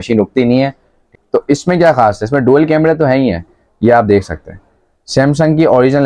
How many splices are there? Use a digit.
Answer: 1